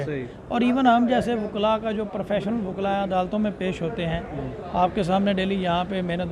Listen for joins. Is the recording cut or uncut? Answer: uncut